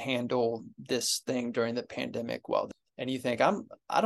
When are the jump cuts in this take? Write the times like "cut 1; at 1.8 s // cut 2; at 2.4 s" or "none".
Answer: cut 1; at 2.8 s